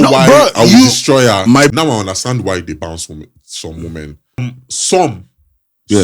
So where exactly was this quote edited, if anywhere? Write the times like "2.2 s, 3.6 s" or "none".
1.7 s, 4.4 s